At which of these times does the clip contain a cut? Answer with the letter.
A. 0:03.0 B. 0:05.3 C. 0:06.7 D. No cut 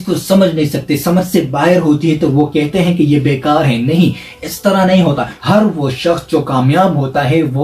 B